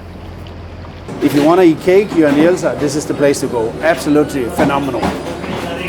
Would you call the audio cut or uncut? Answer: cut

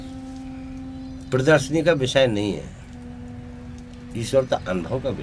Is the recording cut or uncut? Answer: uncut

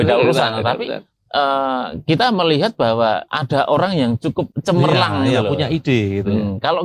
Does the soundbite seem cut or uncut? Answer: uncut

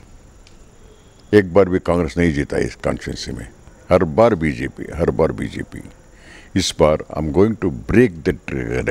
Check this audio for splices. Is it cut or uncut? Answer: uncut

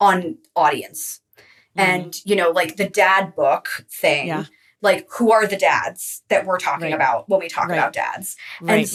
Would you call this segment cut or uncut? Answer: uncut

